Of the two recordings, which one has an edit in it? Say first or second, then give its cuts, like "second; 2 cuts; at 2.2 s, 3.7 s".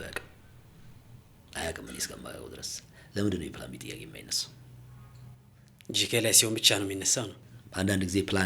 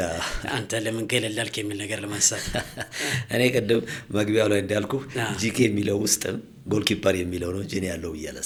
first; 1 cut; at 7.3 s